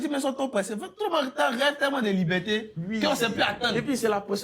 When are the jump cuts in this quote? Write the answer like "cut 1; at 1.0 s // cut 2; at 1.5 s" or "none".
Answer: none